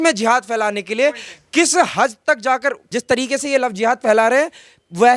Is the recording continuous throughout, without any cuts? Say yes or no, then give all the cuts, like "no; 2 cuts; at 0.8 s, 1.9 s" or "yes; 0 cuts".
no; 1 cut; at 2.8 s